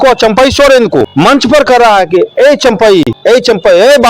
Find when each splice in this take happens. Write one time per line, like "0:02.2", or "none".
0:01.0
0:03.1